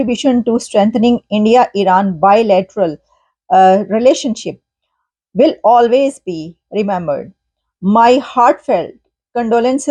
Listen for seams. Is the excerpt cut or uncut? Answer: uncut